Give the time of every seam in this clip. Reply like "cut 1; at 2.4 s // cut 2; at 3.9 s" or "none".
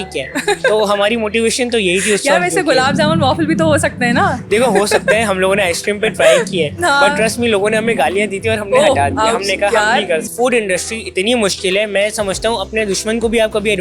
cut 1; at 10.2 s